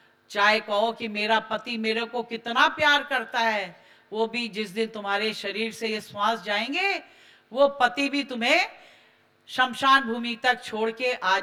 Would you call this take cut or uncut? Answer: uncut